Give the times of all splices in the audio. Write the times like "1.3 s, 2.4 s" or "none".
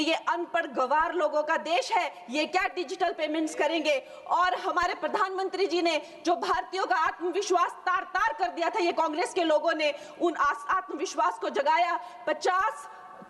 none